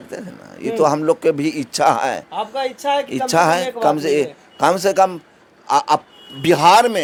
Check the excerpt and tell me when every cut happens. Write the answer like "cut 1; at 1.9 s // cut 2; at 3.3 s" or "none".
none